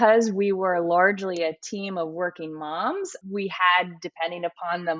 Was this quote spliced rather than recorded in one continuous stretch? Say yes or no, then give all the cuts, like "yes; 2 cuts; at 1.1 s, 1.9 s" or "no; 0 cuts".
yes; 1 cut; at 3.1 s